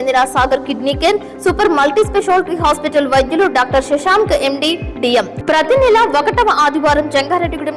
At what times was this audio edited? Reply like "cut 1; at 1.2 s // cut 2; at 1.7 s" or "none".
cut 1; at 5.3 s